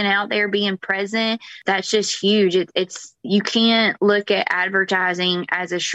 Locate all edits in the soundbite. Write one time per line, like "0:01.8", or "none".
0:01.6

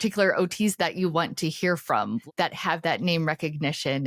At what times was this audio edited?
0:02.2

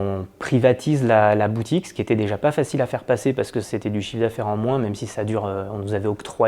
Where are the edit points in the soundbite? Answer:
none

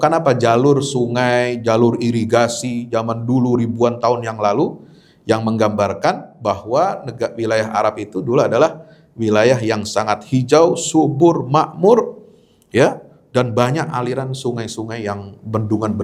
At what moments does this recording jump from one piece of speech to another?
none

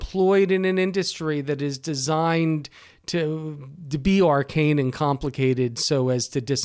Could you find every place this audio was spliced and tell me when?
none

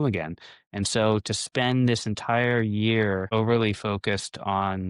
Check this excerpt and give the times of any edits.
0:03.3

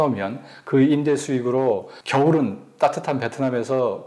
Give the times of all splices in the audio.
none

